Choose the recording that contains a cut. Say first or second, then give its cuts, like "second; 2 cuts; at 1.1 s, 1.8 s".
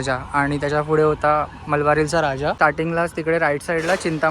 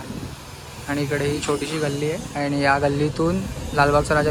first; 1 cut; at 2.6 s